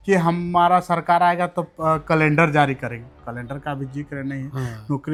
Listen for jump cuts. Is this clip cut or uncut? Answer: uncut